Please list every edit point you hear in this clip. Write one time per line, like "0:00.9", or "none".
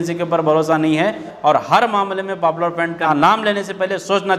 0:01.3
0:03.1